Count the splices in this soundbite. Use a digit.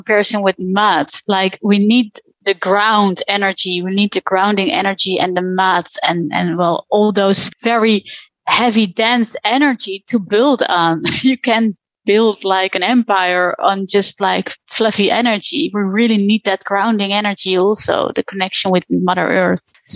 0